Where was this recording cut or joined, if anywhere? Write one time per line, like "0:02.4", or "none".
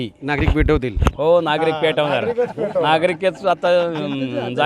none